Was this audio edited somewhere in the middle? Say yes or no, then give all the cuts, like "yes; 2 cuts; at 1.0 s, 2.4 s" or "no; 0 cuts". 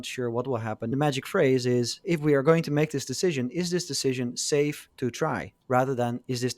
yes; 3 cuts; at 0.9 s, 2.0 s, 5.5 s